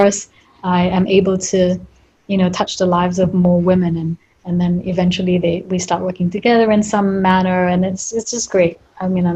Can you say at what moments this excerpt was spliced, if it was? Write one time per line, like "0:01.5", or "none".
none